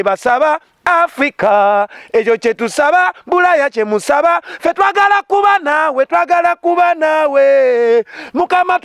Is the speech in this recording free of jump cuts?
yes; 0 cuts

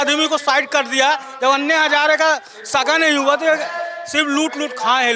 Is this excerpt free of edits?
yes; 0 cuts

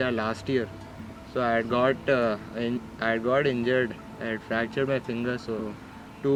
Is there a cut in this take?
no; 0 cuts

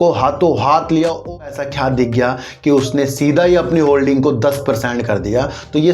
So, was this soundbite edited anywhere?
yes; 1 cut; at 1.2 s

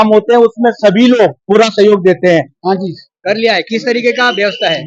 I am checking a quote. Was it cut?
yes; 2 cuts; at 1.4 s, 2.5 s

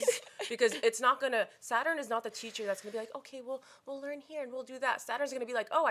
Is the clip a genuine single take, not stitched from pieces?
yes; 0 cuts

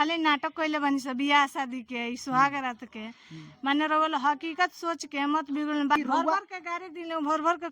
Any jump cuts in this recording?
yes; 1 cut; at 6.0 s

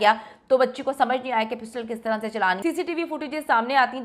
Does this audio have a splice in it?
yes; 1 cut; at 2.6 s

